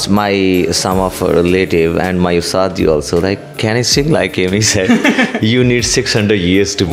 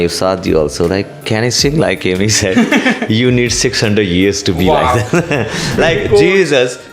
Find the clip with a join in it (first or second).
second